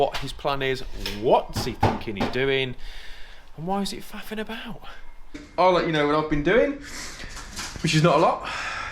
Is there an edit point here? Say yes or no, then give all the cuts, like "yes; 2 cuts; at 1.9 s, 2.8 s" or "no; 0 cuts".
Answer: yes; 1 cut; at 5.4 s